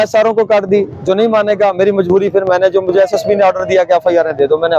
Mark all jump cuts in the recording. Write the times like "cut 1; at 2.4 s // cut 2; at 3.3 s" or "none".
none

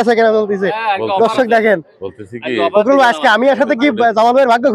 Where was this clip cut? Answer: none

